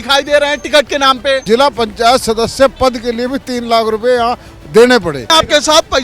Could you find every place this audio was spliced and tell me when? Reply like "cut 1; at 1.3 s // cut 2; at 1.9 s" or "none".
cut 1; at 1.4 s // cut 2; at 5.2 s